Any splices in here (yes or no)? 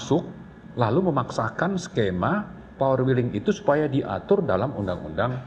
no